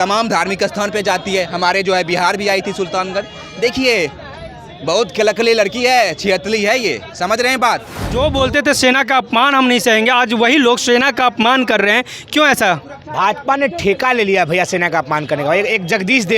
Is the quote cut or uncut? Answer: cut